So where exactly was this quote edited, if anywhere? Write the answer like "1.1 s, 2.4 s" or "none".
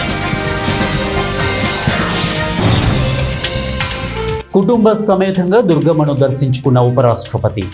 4.4 s